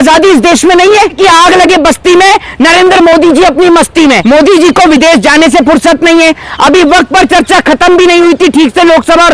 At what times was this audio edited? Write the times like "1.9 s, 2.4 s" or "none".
1.2 s, 4.2 s